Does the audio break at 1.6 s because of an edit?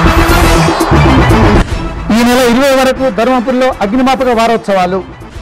yes; 1 cut; at 1.6 s

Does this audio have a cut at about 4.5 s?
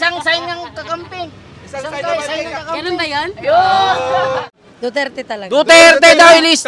yes; 1 cut; at 4.5 s

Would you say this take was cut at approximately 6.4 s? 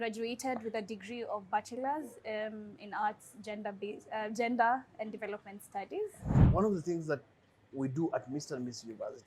yes; 1 cut; at 6.4 s

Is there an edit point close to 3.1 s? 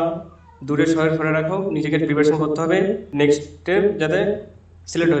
yes; 1 cut; at 3.1 s

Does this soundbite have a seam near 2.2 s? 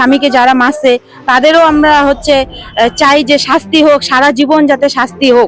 no; 0 cuts

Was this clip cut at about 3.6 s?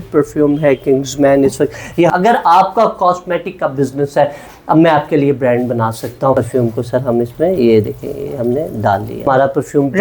no; 3 cuts; at 2.1 s, 6.3 s, 9.3 s

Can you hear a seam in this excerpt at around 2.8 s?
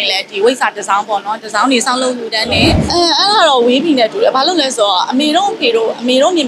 yes; 1 cut; at 2.8 s

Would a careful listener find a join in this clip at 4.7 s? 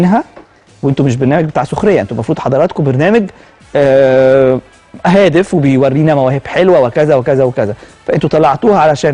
no; 0 cuts

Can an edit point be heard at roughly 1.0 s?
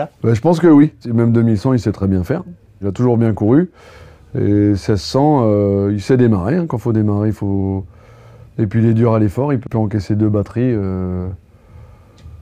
yes; 3 cuts; at 1.0 s, 2.9 s, 9.6 s

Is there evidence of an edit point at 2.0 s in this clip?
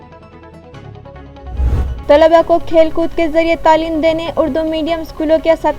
yes; 1 cut; at 2.0 s

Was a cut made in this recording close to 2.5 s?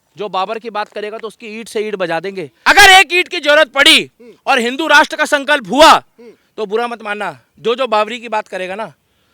yes; 1 cut; at 2.5 s

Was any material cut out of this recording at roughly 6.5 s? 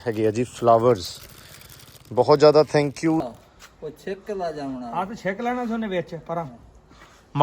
no; 1 cut; at 3.3 s

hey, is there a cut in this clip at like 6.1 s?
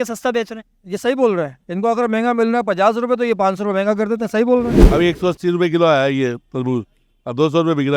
no; 1 cut; at 4.8 s

